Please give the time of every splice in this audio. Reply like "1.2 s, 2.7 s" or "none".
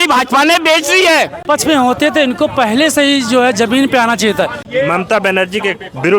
1.4 s, 4.6 s